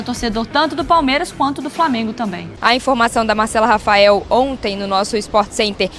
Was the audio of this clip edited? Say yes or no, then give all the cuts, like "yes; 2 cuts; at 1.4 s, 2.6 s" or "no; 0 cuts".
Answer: yes; 1 cut; at 2.5 s